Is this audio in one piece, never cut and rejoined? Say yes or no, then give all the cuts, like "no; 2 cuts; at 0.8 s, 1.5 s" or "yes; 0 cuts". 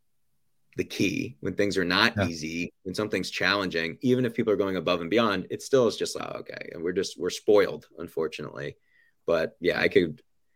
no; 2 cuts; at 6.3 s, 9.6 s